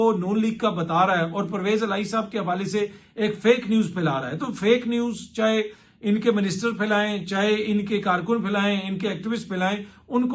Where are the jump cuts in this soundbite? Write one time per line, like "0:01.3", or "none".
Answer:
none